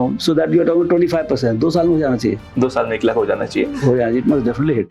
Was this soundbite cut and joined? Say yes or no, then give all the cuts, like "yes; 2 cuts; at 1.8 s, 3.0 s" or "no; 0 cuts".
no; 0 cuts